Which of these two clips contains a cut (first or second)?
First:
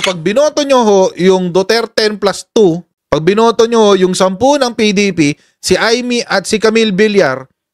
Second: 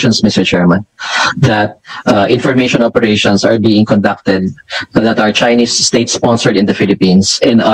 first